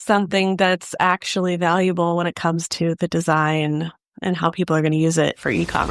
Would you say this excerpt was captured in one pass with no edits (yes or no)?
yes